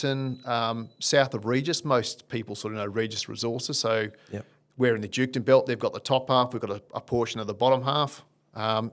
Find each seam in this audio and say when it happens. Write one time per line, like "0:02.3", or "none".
none